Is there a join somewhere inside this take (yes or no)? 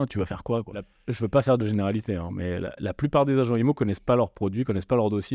yes